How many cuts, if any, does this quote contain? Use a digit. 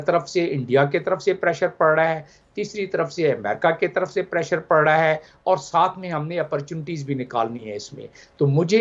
0